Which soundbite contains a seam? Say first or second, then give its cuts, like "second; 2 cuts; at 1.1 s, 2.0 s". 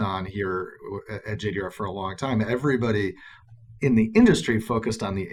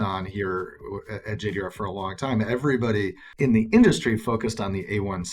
second; 1 cut; at 3.2 s